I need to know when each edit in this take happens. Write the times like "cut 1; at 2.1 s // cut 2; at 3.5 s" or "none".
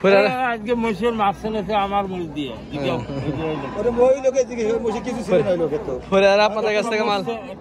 none